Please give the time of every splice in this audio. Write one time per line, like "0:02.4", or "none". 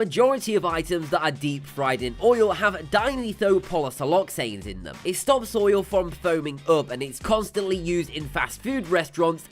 0:07.5